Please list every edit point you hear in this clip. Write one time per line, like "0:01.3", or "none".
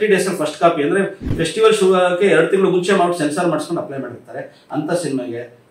none

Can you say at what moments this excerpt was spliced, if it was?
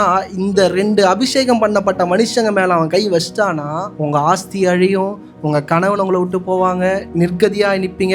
0:03.9
0:07.1

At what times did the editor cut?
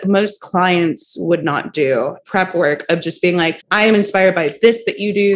0:02.2
0:03.6

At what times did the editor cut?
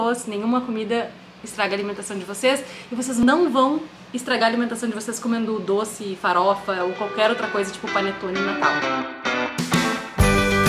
0:03.2
0:08.6

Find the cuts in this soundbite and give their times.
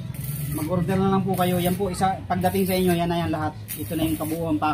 none

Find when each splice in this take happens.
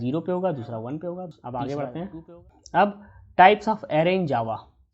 0:01.3

